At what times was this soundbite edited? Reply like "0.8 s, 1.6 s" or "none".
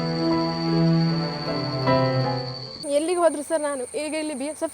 2.5 s